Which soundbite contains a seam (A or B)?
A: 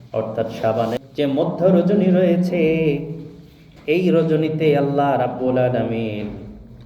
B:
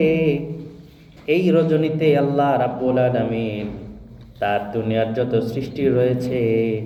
A